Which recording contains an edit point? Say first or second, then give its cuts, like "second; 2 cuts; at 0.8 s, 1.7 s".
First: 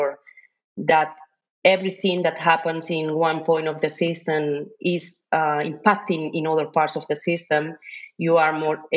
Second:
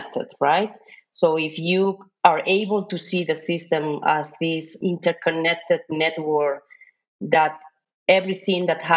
second; 1 cut; at 4.8 s